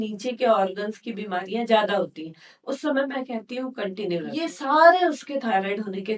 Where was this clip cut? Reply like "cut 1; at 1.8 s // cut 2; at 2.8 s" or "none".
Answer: cut 1; at 4.4 s